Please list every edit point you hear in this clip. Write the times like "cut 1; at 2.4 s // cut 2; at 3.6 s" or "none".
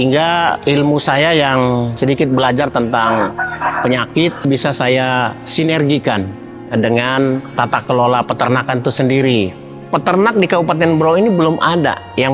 cut 1; at 9.8 s